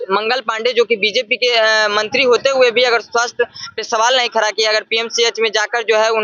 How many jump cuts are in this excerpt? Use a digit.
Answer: 0